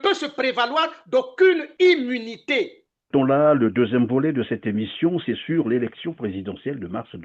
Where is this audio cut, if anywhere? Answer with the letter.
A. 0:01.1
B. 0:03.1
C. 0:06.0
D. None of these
B